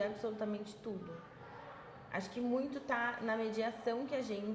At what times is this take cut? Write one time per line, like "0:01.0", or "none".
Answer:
none